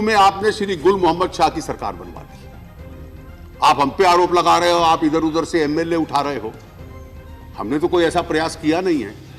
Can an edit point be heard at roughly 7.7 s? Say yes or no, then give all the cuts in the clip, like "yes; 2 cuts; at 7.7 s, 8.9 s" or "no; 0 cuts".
no; 2 cuts; at 2.2 s, 3.6 s